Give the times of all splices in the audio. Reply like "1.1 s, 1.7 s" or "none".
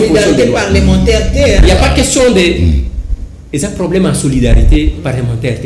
none